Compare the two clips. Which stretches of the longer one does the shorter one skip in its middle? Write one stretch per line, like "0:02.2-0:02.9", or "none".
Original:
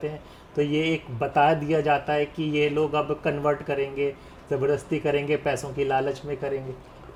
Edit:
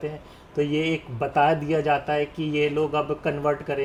none